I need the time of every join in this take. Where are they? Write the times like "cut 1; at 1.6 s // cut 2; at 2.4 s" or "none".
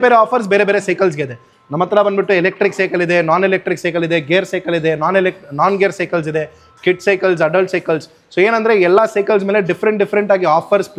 none